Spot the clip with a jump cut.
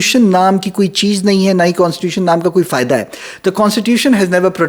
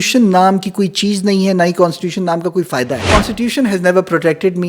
second; 1 cut; at 3.1 s

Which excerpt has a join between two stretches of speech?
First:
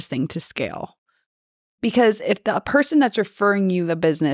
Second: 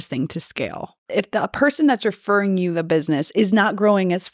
second; 1 cut; at 1.1 s

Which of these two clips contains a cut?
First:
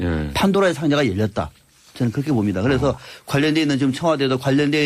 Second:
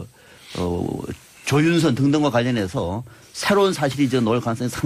first; 1 cut; at 1.4 s

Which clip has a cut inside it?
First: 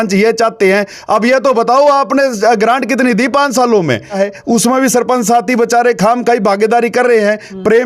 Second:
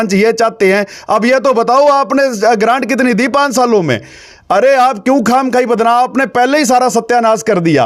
first; 1 cut; at 4.1 s

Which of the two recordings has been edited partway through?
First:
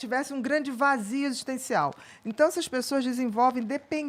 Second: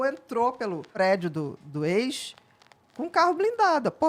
second; 1 cut; at 1.0 s

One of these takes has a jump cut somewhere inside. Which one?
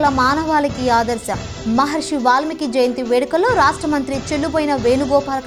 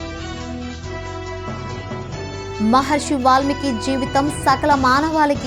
second; 1 cut; at 2.3 s

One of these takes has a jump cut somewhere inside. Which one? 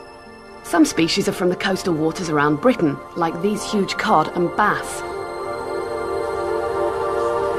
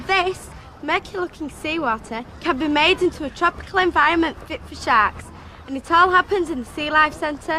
second; 1 cut; at 3.0 s

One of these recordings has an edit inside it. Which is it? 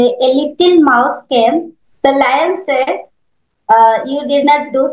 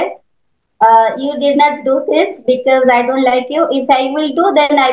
first; 1 cut; at 1.8 s

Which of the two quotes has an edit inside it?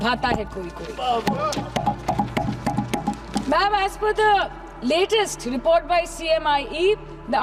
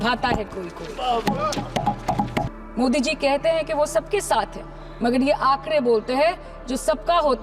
second; 1 cut; at 2.5 s

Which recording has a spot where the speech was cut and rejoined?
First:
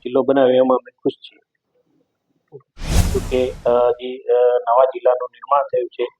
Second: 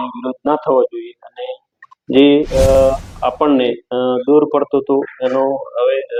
first; 1 cut; at 3.1 s

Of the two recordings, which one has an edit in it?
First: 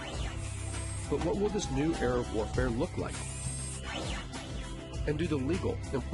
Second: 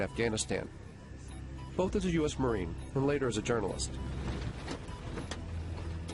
first; 1 cut; at 1.0 s

